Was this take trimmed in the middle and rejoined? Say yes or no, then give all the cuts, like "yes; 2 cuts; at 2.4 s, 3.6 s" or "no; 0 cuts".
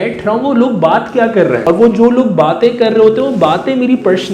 yes; 1 cut; at 1.6 s